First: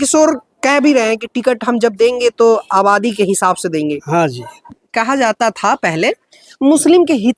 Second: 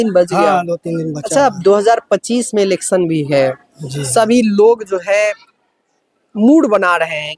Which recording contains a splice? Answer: first; 1 cut; at 4.8 s

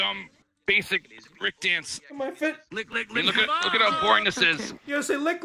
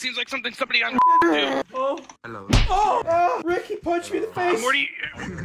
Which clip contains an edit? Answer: second; 2 cuts; at 1.6 s, 3.2 s

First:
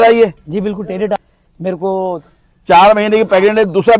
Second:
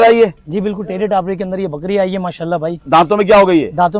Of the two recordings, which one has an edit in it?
first; 1 cut; at 1.2 s

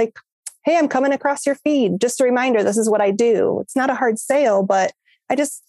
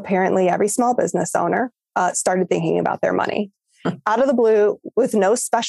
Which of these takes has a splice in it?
second; 1 cut; at 4.0 s

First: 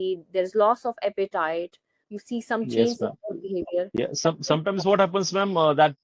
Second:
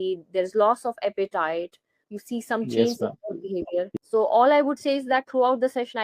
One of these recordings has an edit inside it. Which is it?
second; 1 cut; at 3.9 s

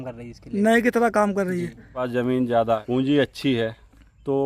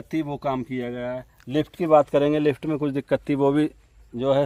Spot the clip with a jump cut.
first; 2 cuts; at 2.0 s, 2.8 s

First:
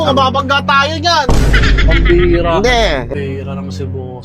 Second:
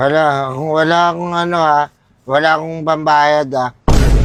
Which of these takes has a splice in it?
first; 1 cut; at 3.1 s

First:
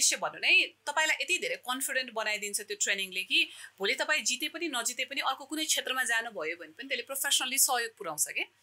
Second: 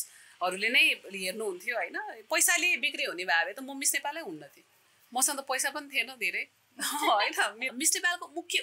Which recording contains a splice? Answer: second; 1 cut; at 7.7 s

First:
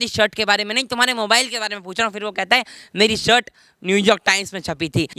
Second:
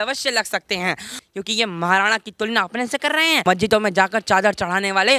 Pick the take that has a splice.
second; 2 cuts; at 1.1 s, 3.4 s

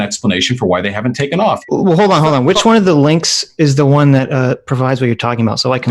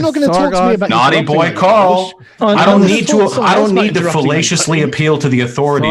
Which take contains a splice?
first; 1 cut; at 1.7 s

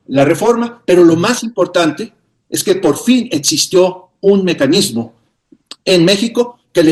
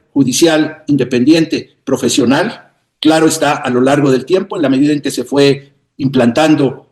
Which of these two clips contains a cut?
second; 1 cut; at 2.7 s

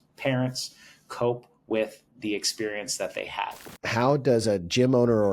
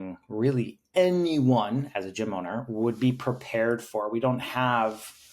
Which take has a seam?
first; 1 cut; at 3.7 s

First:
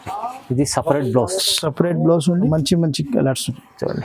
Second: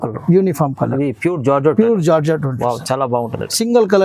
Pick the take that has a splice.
first; 1 cut; at 2.4 s

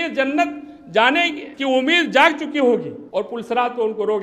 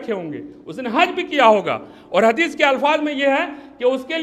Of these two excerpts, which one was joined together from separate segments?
first; 2 cuts; at 1.4 s, 3.0 s

